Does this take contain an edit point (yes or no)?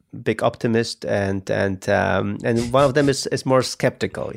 no